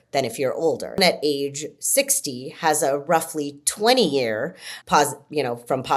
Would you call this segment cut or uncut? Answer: cut